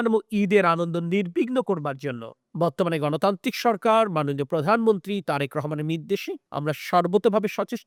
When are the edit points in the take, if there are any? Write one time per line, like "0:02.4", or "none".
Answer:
none

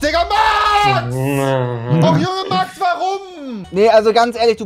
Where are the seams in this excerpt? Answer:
none

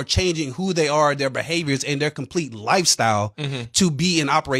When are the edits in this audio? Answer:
none

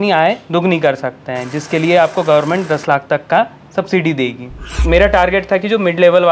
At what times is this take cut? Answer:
0:04.8

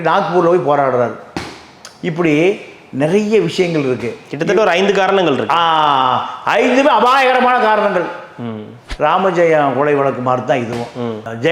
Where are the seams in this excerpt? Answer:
0:08.8

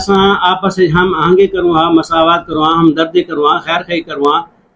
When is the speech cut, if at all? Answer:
none

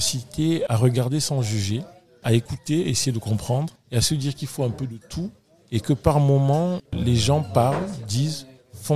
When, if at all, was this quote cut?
none

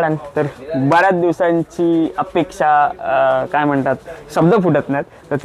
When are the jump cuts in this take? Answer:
none

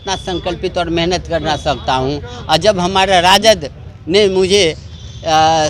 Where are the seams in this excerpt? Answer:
none

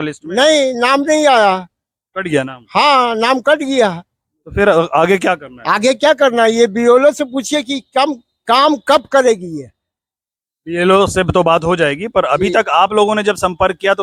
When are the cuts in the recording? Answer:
none

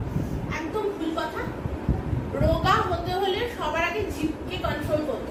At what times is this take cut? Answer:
none

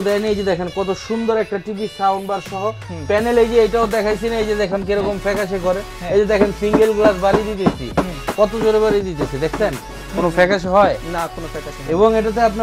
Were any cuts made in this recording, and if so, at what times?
none

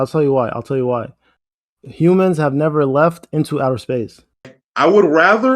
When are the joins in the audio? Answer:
0:04.6

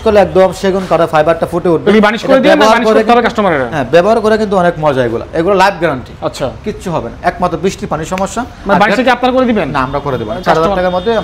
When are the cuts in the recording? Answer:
none

